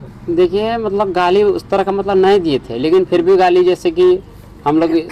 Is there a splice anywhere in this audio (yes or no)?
no